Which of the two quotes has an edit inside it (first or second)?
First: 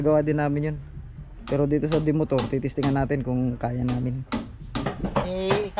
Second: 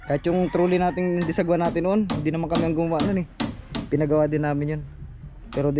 first